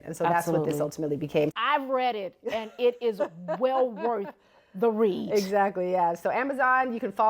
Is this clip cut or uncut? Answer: cut